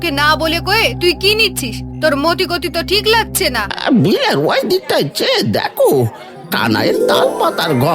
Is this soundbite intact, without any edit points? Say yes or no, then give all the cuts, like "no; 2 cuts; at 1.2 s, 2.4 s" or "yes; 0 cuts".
no; 1 cut; at 3.7 s